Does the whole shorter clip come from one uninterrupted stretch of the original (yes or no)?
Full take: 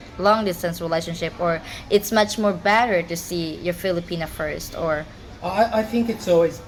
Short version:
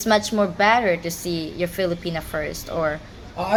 yes